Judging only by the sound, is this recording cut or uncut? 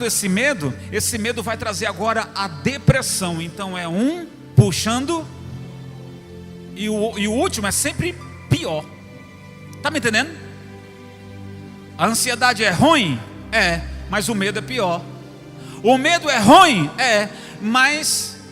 uncut